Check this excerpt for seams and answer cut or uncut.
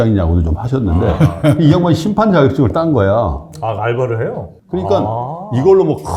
cut